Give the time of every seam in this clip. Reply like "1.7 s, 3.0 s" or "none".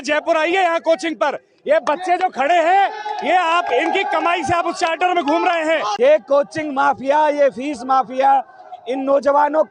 5.9 s